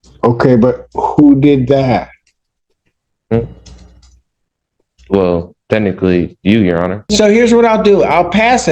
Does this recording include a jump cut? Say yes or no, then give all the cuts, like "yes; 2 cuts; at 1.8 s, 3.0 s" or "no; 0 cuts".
yes; 1 cut; at 7.1 s